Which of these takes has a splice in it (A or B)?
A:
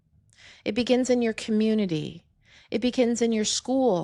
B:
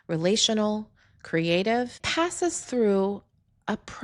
B